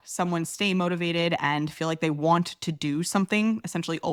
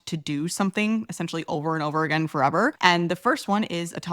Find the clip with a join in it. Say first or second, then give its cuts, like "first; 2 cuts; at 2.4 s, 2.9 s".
second; 1 cut; at 2.8 s